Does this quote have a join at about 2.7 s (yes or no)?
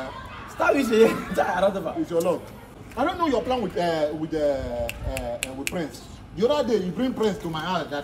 yes